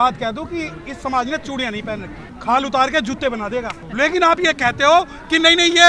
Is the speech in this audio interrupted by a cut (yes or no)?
yes